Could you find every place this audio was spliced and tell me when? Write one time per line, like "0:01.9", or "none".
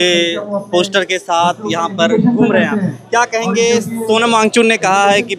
none